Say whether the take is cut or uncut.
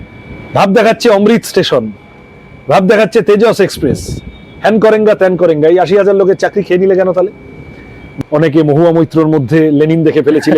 cut